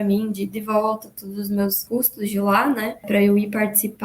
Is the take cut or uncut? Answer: cut